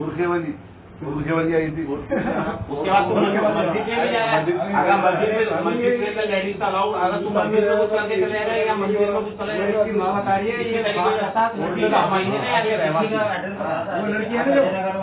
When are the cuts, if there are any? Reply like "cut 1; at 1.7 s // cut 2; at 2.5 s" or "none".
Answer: none